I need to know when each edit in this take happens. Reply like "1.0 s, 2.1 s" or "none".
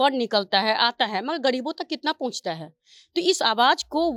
none